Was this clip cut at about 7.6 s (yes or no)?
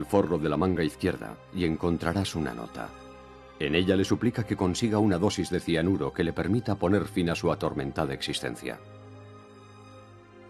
no